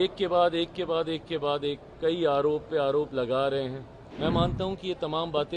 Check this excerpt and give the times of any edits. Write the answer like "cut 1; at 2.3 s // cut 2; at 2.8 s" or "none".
cut 1; at 4.1 s